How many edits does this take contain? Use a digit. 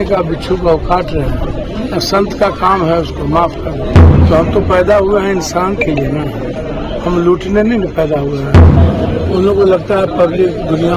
4